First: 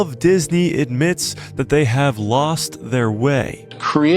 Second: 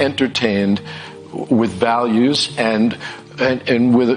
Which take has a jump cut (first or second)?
first